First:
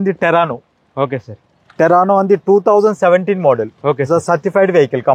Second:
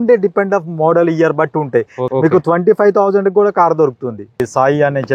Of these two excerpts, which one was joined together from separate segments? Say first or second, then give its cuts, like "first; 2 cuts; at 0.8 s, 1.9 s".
second; 2 cuts; at 2.0 s, 4.4 s